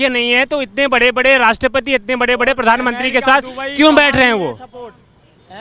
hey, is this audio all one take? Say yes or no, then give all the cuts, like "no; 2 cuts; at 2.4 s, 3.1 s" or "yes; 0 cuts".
yes; 0 cuts